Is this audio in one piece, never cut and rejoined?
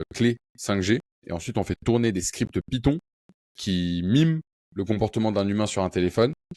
no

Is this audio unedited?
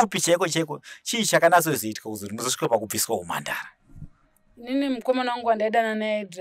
yes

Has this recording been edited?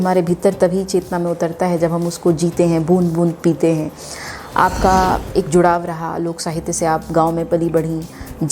no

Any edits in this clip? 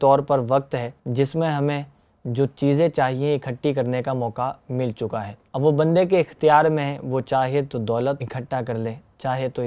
yes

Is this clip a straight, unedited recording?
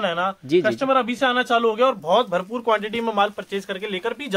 yes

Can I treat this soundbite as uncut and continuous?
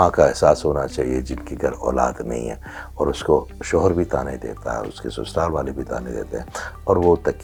yes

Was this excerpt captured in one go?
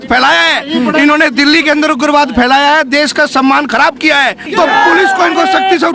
no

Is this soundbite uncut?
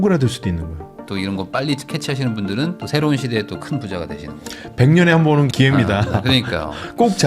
no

